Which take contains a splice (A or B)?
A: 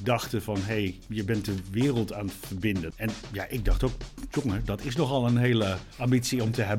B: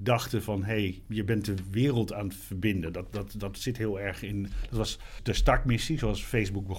A